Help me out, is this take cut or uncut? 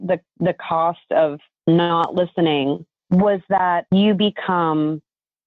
cut